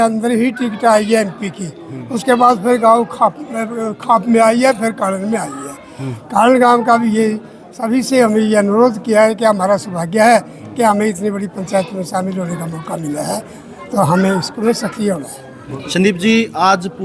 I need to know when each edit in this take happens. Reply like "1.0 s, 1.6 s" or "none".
none